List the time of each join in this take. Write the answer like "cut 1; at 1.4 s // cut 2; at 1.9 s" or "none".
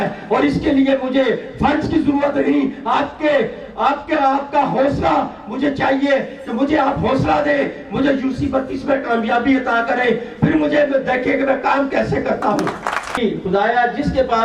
cut 1; at 13.2 s